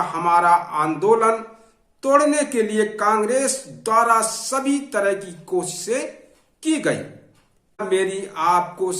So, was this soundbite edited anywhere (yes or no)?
yes